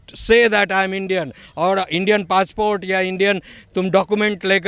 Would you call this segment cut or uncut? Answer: uncut